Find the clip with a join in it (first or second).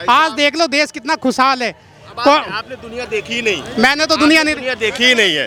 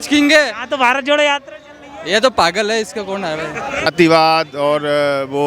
second